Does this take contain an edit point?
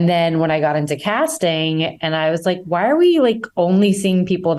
no; 0 cuts

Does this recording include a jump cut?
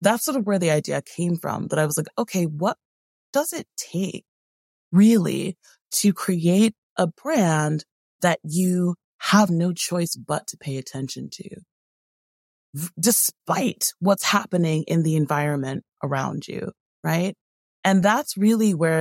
no; 0 cuts

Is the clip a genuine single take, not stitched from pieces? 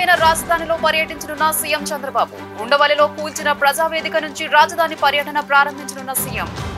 yes; 0 cuts

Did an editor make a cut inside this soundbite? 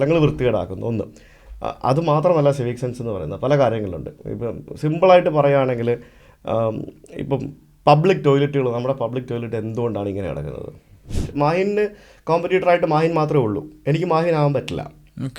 yes; 1 cut; at 11.2 s

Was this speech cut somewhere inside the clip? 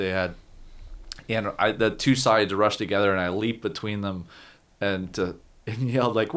no; 0 cuts

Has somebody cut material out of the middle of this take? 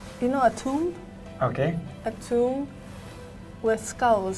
no; 0 cuts

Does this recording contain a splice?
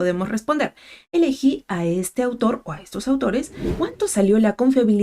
yes; 1 cut; at 3.6 s

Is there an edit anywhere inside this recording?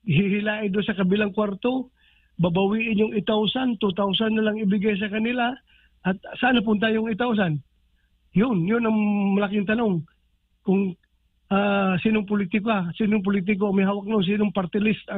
no; 0 cuts

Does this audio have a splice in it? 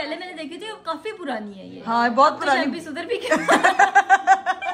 no; 0 cuts

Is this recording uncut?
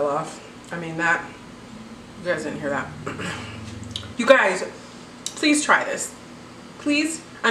no; 1 cut; at 4.1 s

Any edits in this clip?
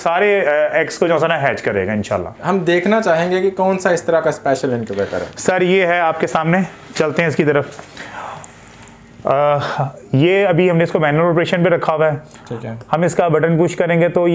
no; 0 cuts

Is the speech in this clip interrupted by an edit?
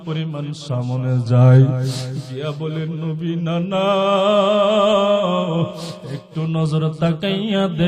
no; 0 cuts

